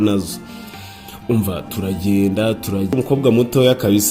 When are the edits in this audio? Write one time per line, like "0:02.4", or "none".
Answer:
0:02.9